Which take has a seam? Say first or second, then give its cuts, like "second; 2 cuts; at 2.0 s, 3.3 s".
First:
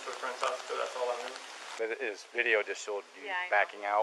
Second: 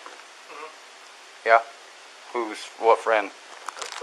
first; 1 cut; at 1.7 s